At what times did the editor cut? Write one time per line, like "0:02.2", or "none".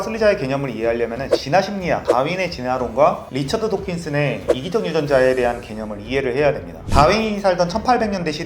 0:06.7